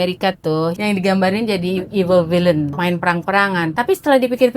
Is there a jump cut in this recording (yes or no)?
yes